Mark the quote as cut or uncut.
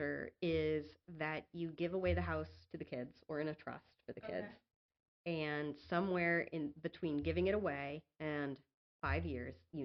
uncut